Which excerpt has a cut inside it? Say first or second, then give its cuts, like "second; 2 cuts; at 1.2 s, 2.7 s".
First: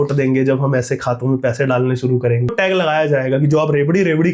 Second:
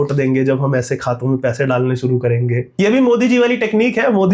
first; 1 cut; at 2.5 s